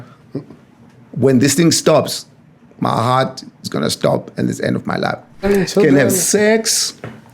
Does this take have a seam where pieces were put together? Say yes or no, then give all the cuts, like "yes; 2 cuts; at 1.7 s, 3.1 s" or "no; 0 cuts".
yes; 1 cut; at 5.5 s